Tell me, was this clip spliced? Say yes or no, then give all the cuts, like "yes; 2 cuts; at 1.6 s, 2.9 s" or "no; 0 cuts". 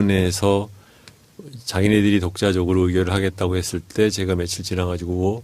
yes; 1 cut; at 2.0 s